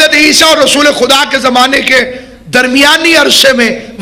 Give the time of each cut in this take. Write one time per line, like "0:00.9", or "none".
none